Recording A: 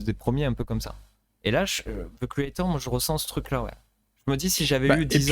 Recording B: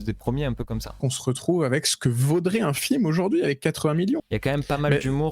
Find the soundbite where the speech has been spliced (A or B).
B